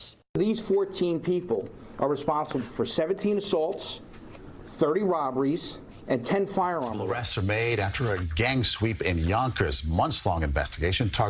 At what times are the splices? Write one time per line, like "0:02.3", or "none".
0:07.6